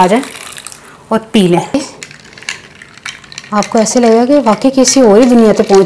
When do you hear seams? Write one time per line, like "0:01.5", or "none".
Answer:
0:01.7